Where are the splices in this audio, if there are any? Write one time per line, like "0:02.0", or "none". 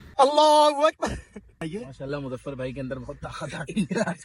0:01.6